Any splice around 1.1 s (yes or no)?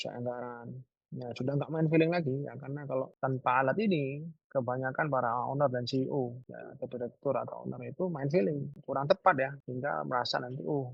no